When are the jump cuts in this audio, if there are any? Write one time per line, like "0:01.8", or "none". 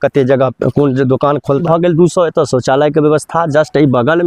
0:01.6